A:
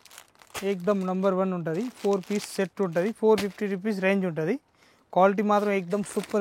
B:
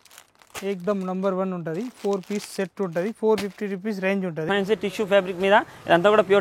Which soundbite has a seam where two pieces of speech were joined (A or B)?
B